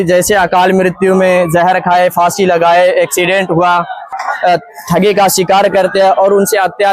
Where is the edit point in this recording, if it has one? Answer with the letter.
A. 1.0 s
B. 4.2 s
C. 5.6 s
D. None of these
B